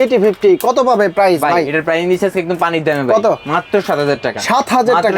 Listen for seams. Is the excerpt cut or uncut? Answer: uncut